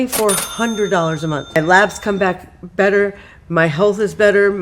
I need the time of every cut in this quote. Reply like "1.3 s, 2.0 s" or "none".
1.5 s